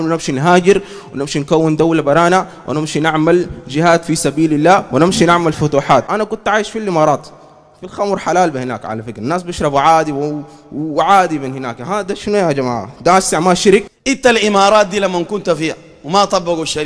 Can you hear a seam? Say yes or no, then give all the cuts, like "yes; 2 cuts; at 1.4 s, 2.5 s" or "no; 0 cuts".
yes; 2 cuts; at 6.1 s, 14.0 s